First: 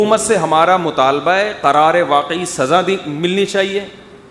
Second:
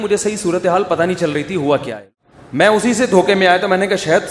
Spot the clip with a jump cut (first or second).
second